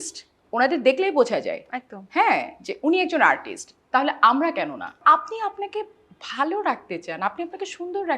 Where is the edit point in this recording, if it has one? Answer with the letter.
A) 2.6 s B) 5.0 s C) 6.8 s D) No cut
B